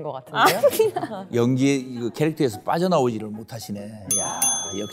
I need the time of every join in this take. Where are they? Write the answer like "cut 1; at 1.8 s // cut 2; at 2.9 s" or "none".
cut 1; at 1.2 s